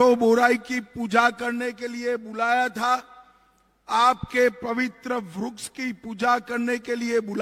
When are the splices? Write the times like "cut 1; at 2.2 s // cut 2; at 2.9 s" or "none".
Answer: none